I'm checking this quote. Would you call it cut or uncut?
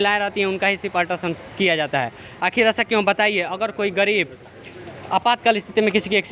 uncut